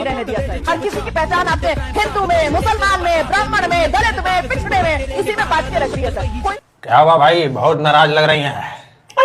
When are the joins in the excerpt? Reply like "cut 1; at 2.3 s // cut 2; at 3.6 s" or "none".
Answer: cut 1; at 6.5 s